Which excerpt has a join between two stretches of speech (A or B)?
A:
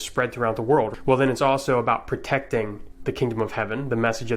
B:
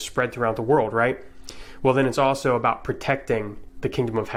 A